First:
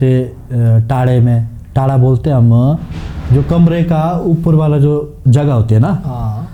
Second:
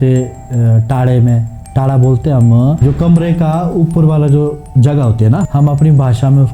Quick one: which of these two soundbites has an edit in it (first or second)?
second